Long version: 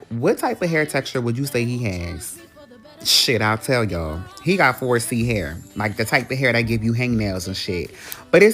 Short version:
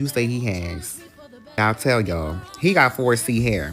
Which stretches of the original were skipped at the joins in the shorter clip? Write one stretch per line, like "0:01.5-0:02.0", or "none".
0:02.9-0:03.4